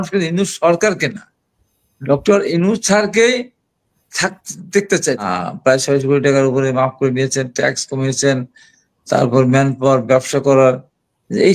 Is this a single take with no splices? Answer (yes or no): no